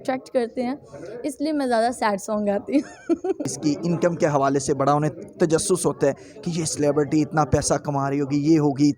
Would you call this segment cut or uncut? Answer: cut